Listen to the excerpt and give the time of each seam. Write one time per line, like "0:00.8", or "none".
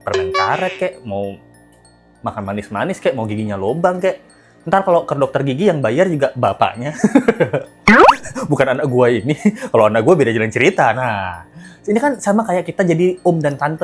none